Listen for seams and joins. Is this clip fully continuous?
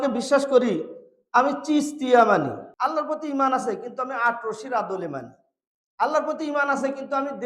no; 1 cut; at 2.6 s

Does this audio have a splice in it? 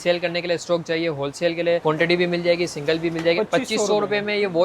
yes; 2 cuts; at 1.8 s, 3.4 s

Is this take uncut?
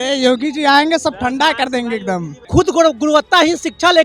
no; 1 cut; at 2.3 s

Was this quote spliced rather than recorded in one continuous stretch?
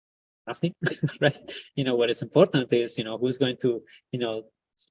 no; 0 cuts

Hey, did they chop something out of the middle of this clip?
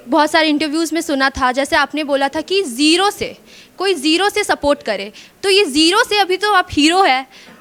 no; 0 cuts

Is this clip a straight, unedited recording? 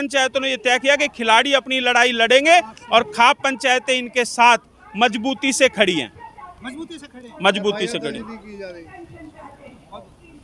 yes; 0 cuts

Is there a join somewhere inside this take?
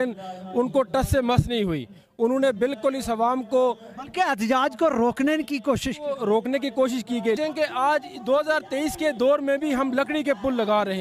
yes; 1 cut; at 7.4 s

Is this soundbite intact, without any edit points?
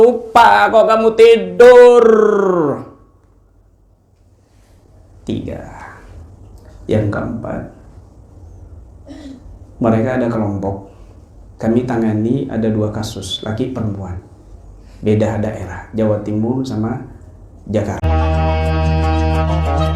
no; 1 cut; at 18.0 s

